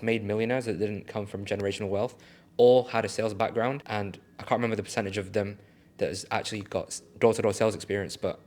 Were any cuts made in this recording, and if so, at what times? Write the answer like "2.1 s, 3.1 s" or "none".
3.8 s

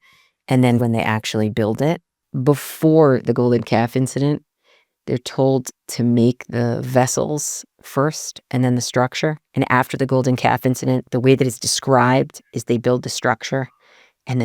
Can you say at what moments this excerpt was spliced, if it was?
0.8 s, 2.3 s, 9.4 s

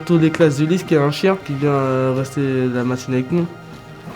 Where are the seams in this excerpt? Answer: 1.5 s

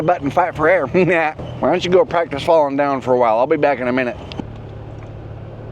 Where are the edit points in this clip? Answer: 1.4 s, 4.4 s

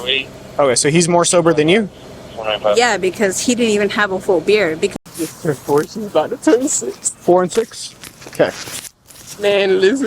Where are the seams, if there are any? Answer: 5.0 s

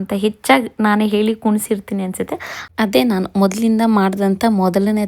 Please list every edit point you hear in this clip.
none

